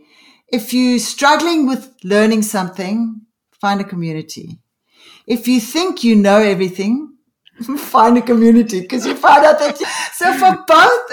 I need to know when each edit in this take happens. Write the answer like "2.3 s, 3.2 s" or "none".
9.8 s

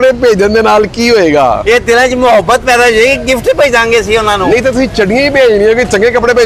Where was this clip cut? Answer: none

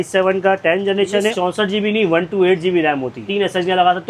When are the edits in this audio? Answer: 1.3 s, 3.3 s

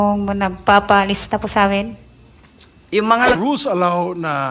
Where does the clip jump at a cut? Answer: 3.4 s

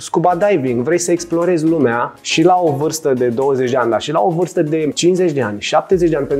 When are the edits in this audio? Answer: 2.1 s, 4.9 s

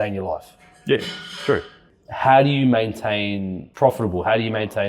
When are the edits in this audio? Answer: 1.8 s, 3.6 s

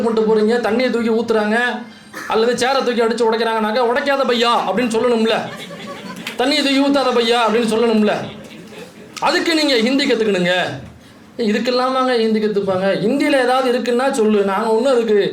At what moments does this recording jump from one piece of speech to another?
none

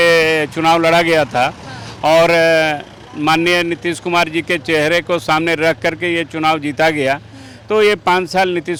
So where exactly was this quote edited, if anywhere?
none

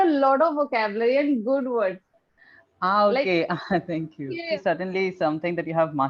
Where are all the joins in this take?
4.6 s

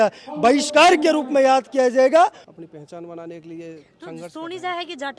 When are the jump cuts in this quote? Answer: 2.4 s

